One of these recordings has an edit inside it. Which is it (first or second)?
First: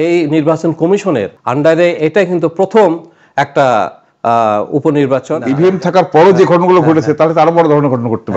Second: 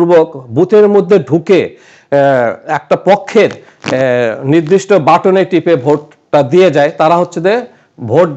first